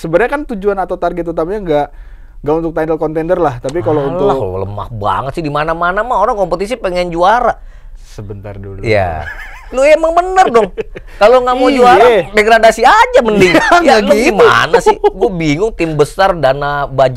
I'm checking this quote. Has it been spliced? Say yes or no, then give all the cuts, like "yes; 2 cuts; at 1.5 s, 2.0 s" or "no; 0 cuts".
no; 0 cuts